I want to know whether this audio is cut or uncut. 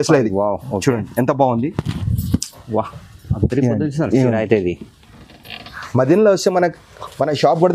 uncut